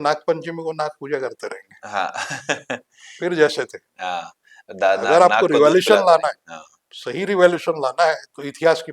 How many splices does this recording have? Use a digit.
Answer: 0